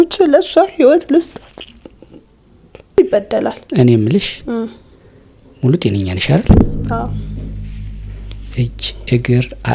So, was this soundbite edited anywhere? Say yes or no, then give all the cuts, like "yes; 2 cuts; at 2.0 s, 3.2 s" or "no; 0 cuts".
yes; 1 cut; at 3.0 s